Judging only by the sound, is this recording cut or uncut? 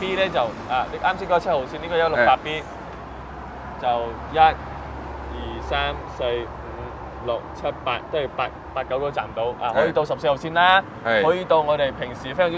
uncut